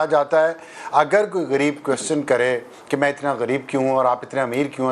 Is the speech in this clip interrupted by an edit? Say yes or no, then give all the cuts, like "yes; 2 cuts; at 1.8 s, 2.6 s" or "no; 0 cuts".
no; 0 cuts